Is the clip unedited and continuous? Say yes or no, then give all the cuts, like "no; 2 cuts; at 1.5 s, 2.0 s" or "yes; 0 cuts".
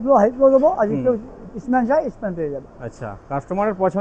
yes; 0 cuts